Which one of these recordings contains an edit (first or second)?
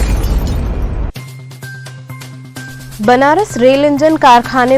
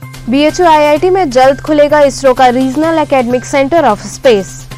first